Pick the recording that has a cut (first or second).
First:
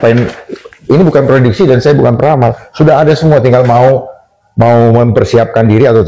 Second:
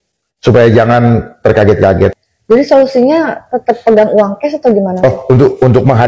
second